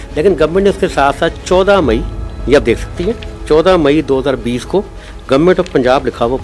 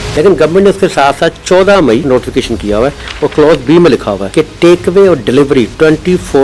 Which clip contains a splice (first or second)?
second